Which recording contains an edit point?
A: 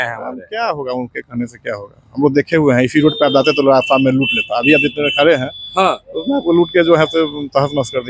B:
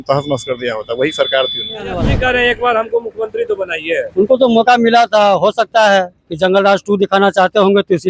B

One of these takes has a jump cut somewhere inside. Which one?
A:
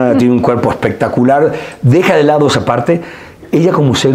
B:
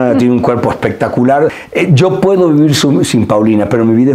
B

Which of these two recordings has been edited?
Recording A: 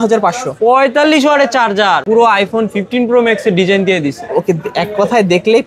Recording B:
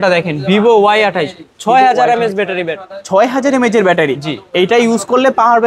A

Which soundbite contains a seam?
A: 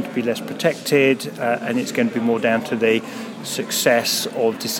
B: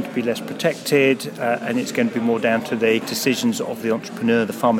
B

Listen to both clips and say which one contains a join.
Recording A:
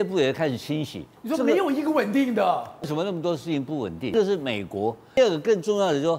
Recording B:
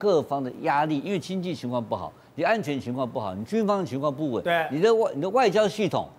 A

